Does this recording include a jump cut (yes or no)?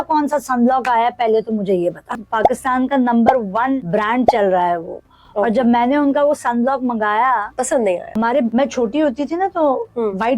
yes